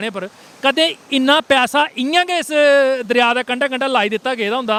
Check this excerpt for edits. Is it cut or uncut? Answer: uncut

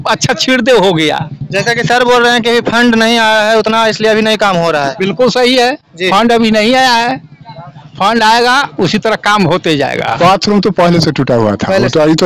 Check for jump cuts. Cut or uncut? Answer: cut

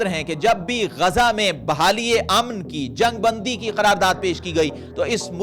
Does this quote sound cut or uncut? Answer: uncut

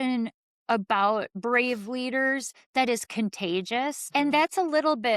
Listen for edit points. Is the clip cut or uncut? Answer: cut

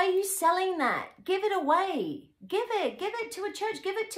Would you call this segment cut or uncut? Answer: uncut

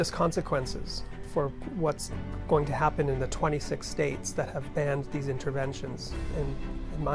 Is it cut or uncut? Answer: cut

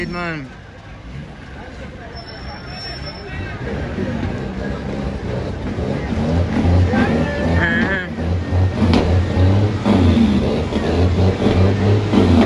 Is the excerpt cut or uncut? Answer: uncut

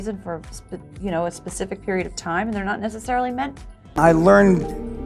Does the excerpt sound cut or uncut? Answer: uncut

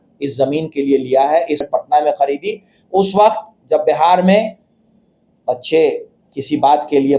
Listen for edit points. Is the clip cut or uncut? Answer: cut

